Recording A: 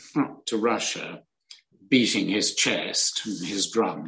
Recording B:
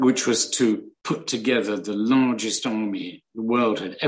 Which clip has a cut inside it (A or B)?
B